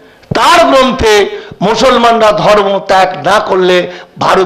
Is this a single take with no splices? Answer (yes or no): yes